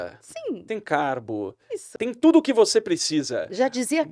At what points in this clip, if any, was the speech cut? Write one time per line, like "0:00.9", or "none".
0:01.9